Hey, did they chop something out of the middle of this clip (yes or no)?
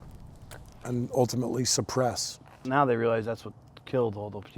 yes